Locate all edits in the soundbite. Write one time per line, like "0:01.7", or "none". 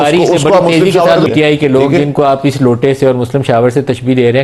0:01.3